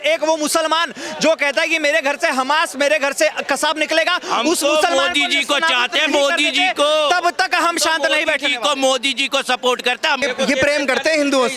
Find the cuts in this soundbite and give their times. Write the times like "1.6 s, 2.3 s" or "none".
10.2 s